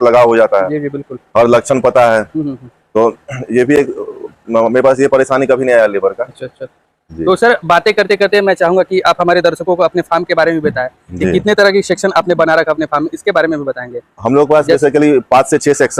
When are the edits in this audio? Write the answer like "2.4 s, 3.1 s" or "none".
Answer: none